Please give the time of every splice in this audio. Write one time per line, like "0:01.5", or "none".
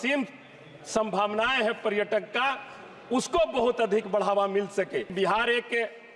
0:05.1